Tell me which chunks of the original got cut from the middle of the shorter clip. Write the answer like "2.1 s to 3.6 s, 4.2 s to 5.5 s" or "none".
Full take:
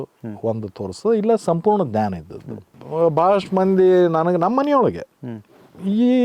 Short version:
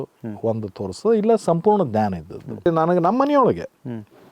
2.7 s to 4.0 s